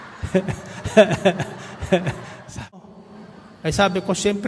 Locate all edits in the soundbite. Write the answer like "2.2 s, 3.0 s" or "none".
2.8 s